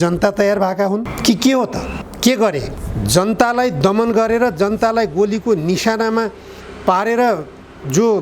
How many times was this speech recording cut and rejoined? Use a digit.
3